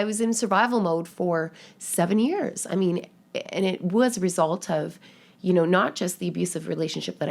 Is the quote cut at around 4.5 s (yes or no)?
no